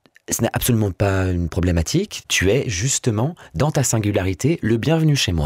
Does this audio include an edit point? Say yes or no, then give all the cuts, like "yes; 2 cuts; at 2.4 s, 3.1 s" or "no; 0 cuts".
yes; 1 cut; at 2.2 s